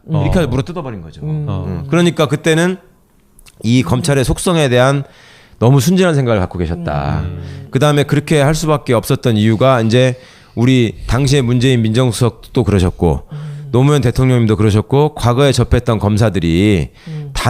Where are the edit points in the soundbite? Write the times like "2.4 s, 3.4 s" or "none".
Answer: 5.6 s